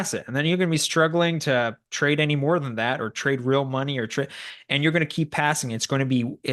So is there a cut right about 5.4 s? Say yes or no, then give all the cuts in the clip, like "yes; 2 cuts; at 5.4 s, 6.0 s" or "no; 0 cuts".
no; 0 cuts